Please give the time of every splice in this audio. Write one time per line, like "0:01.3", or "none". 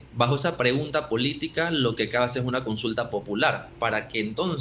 none